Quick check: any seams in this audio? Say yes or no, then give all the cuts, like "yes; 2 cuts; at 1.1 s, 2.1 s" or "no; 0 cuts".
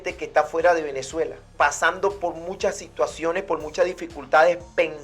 yes; 1 cut; at 1.4 s